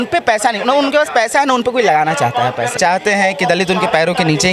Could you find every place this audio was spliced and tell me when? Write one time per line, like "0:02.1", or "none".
0:02.8